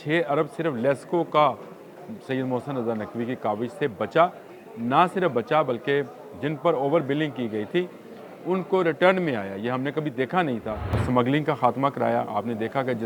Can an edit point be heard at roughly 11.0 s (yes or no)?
yes